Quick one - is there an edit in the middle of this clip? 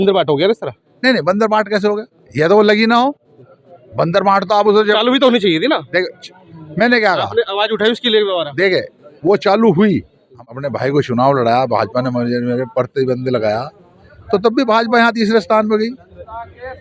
yes; 1 cut; at 10.3 s

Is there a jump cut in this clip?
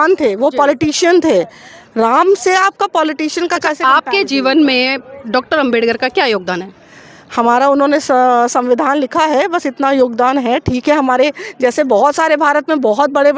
no; 0 cuts

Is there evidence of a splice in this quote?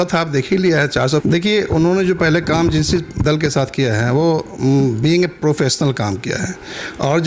yes; 1 cut; at 1.2 s

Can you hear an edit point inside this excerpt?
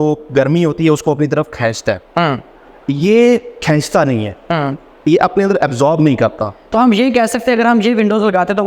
no; 0 cuts

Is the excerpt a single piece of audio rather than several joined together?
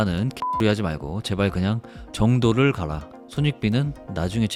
yes; 0 cuts

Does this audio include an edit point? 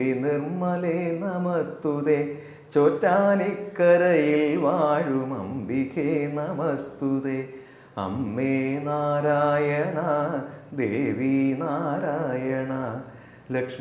no; 0 cuts

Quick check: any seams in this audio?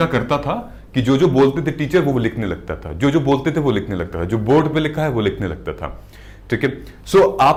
no; 0 cuts

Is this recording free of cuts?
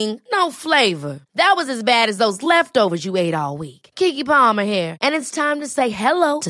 yes; 0 cuts

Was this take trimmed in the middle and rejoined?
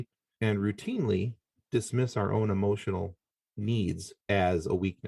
yes; 1 cut; at 4.1 s

